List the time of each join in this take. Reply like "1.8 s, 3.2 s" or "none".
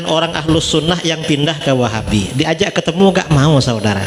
none